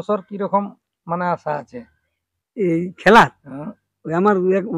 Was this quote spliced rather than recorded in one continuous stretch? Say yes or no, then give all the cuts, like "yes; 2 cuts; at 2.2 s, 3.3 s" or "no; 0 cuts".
no; 0 cuts